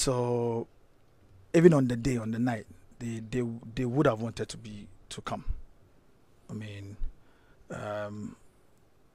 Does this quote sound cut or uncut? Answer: uncut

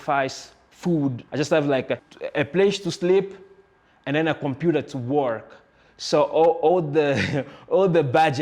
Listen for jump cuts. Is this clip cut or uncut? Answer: cut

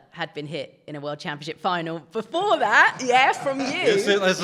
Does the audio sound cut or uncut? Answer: uncut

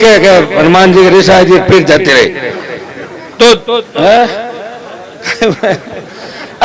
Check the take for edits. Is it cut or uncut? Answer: uncut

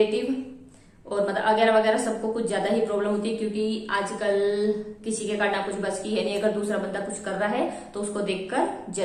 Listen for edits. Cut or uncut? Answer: uncut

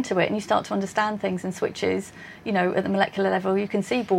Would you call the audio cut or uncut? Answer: uncut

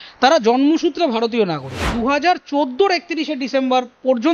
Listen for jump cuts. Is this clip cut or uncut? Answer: cut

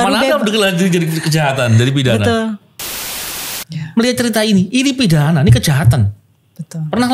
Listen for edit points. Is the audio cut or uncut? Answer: cut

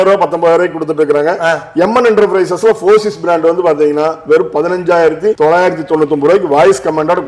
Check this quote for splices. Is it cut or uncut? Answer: uncut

